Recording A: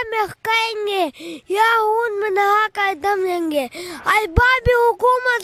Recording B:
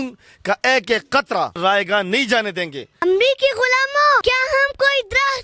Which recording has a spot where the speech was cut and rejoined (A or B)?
B